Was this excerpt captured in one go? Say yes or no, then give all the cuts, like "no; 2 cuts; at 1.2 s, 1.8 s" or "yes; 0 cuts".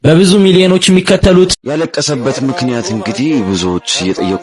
no; 1 cut; at 1.6 s